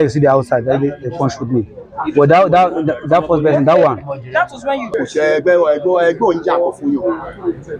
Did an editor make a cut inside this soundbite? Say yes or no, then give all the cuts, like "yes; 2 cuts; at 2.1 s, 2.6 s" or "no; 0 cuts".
yes; 1 cut; at 4.9 s